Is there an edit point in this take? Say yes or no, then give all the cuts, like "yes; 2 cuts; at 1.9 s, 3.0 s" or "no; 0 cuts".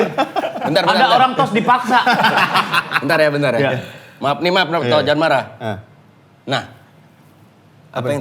no; 0 cuts